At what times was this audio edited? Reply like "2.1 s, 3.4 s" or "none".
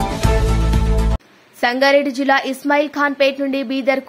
1.1 s